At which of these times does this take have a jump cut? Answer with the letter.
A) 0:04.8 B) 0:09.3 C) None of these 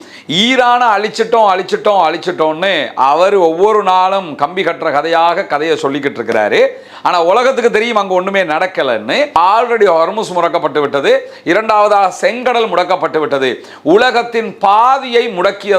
B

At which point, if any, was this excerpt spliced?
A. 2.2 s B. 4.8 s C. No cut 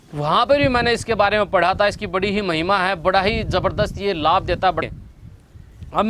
B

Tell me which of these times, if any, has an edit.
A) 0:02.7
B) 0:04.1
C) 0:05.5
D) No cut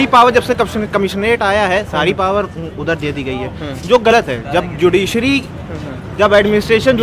D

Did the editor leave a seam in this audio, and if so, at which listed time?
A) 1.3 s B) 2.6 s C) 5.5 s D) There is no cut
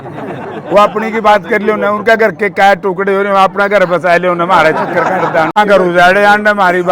C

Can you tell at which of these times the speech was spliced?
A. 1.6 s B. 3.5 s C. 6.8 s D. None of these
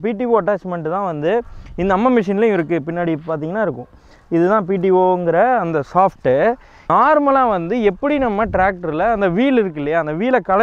C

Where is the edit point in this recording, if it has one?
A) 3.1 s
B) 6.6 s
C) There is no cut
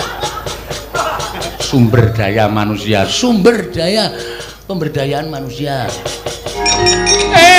B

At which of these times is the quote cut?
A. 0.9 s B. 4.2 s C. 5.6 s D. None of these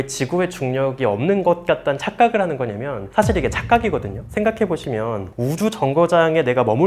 D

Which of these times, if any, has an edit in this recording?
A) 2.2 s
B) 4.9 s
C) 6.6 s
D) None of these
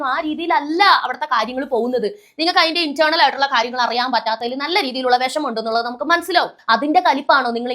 C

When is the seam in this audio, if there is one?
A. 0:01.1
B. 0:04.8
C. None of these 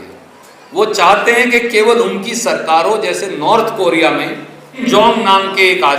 B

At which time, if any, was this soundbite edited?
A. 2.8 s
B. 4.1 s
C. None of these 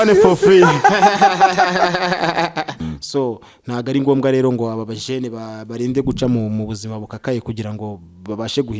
A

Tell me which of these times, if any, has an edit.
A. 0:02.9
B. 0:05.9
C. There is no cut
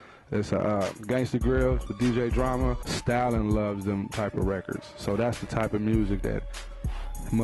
A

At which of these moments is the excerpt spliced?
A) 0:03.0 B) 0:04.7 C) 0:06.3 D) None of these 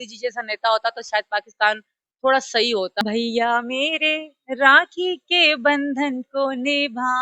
A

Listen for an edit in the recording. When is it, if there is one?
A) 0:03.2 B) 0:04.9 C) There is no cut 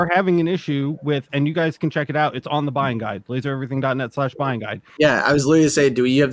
B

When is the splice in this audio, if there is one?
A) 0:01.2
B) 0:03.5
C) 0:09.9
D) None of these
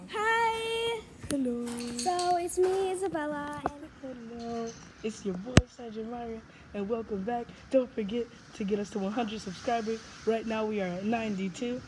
B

